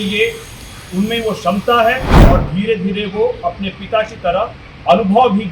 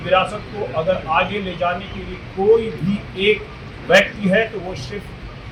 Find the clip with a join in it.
first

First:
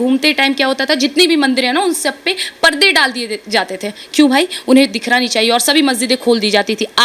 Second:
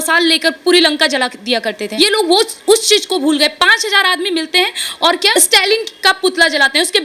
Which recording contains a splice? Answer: second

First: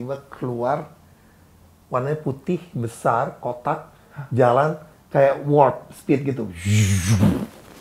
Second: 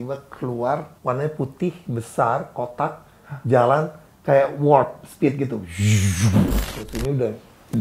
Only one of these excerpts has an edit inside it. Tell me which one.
second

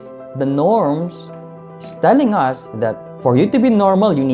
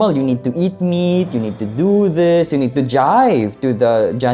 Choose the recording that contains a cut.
first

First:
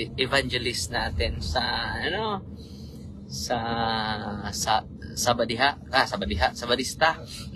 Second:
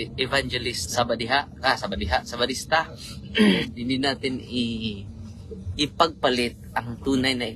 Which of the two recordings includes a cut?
second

